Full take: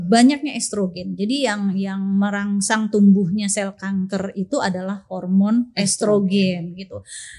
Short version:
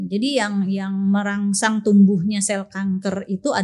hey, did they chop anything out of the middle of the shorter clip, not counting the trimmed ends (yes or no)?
no